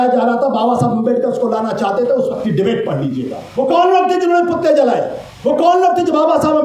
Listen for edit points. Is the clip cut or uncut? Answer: cut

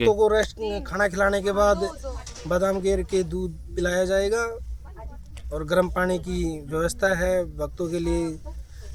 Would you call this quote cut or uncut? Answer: uncut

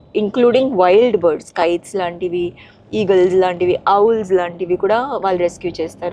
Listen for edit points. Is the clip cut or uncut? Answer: uncut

